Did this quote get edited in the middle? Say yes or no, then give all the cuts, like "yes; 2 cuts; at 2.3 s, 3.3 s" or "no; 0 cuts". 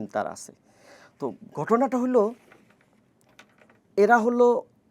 no; 0 cuts